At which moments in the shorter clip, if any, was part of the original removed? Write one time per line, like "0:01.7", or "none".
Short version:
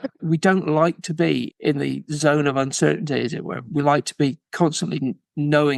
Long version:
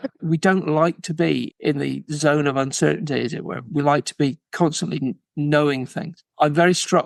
none